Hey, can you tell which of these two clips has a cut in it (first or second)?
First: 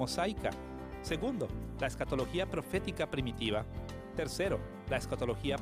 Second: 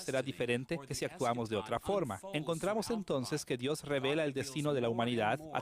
second